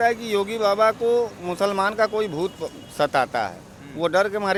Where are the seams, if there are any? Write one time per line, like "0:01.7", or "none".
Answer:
none